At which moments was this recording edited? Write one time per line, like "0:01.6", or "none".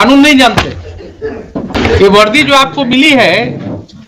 0:01.8